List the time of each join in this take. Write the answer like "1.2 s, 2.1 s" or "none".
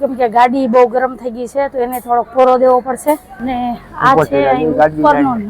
3.3 s